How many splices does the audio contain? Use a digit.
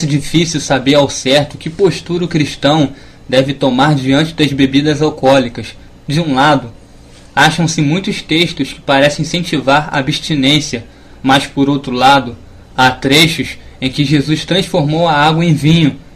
0